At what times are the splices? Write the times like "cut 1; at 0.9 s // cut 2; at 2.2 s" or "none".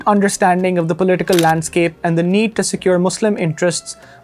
none